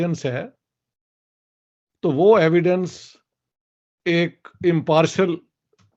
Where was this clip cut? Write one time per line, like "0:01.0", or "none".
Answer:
none